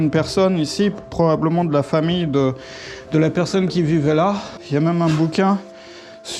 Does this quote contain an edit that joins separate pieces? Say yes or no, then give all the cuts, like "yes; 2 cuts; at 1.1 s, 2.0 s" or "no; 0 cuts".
yes; 1 cut; at 4.6 s